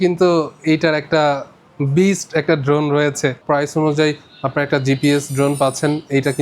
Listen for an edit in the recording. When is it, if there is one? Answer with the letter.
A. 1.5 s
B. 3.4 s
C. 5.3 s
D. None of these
B